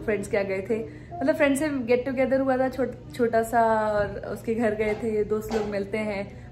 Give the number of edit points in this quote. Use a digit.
0